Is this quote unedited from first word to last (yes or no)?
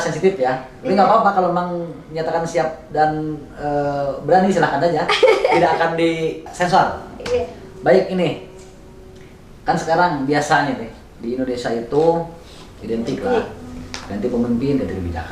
no